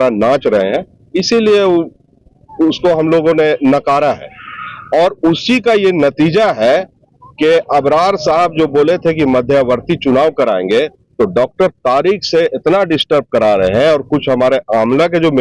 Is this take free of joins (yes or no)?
yes